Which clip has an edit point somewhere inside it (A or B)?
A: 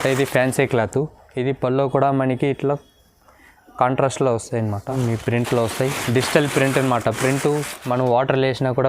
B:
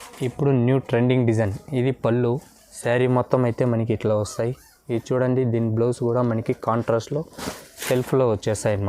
A